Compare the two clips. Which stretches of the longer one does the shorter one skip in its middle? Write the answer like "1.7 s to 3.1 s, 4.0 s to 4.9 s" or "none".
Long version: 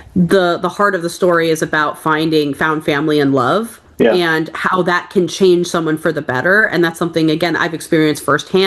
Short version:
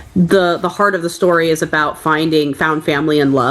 none